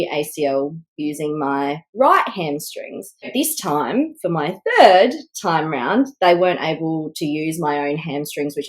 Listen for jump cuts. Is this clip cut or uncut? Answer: cut